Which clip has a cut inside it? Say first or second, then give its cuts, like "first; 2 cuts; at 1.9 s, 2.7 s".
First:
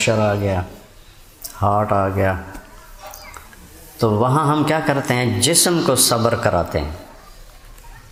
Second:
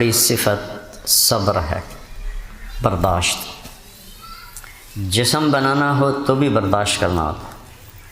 second; 1 cut; at 1.8 s